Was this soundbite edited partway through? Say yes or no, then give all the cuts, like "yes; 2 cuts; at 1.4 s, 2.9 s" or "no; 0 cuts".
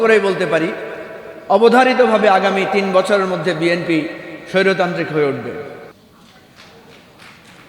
no; 0 cuts